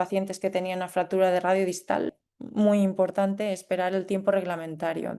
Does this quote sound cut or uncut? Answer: cut